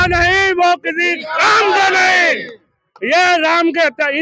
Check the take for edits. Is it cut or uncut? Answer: uncut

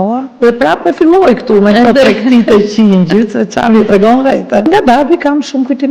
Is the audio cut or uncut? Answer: cut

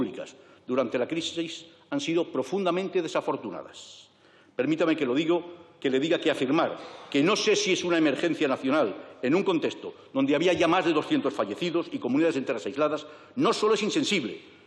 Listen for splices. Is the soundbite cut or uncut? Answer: uncut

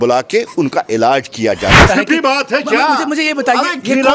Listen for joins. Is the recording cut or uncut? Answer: cut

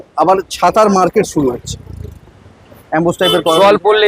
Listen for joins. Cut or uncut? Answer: cut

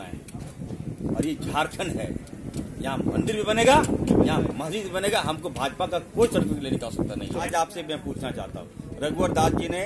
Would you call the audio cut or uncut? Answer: cut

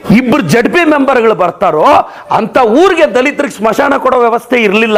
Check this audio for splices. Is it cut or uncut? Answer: uncut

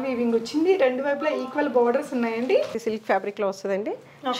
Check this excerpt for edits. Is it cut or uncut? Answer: cut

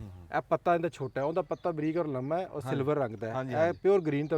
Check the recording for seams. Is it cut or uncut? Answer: uncut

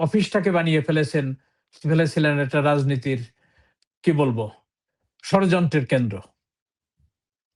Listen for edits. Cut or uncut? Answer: uncut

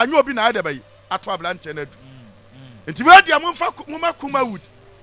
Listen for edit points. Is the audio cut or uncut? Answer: uncut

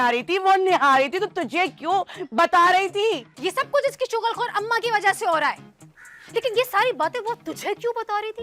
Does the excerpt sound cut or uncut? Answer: uncut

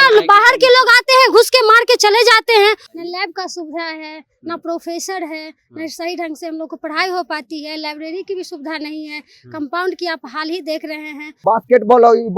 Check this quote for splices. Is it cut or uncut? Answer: cut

